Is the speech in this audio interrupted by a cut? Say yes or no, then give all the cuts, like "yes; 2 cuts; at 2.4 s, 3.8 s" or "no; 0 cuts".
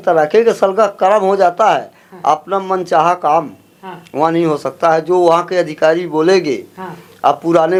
no; 0 cuts